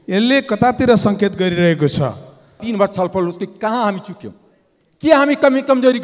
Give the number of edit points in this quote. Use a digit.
1